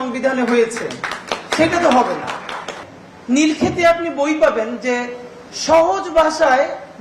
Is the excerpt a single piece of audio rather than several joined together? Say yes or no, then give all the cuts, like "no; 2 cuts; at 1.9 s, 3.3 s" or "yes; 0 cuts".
no; 1 cut; at 2.8 s